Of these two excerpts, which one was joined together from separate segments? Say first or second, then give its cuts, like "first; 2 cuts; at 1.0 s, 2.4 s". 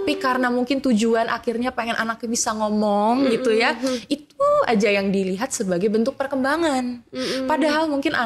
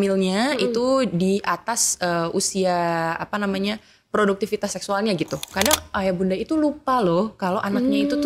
second; 1 cut; at 5.5 s